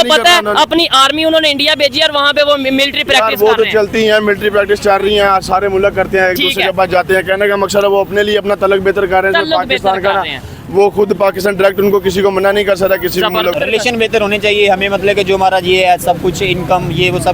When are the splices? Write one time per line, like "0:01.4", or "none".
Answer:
0:13.6